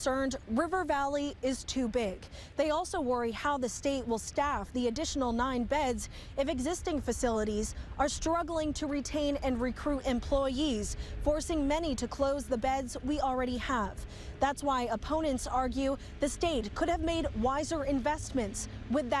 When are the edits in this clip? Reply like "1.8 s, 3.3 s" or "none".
none